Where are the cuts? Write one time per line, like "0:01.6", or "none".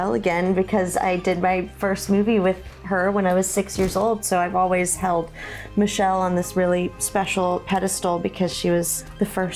none

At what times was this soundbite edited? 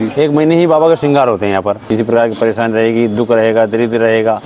0:01.8

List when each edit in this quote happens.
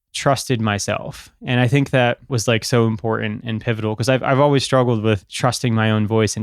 0:02.3
0:05.3

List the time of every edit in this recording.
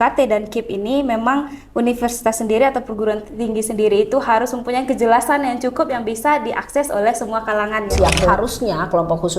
0:08.3

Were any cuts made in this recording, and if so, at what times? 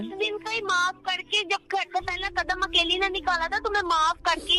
none

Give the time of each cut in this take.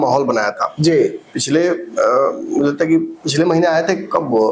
none

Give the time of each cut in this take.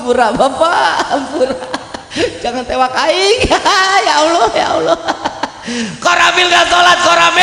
none

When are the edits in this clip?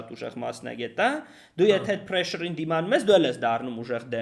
none

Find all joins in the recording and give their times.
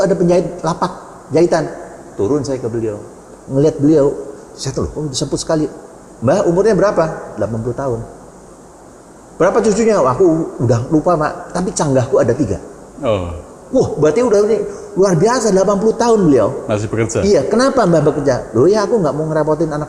none

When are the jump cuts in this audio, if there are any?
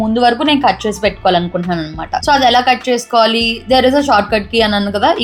none

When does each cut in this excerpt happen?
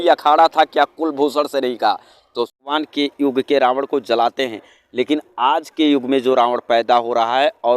0:02.6

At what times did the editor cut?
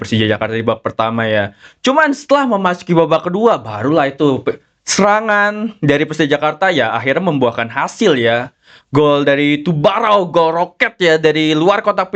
none

